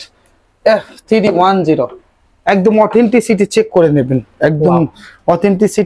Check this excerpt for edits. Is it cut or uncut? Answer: uncut